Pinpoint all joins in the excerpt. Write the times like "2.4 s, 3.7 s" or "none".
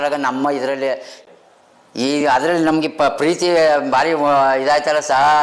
1.1 s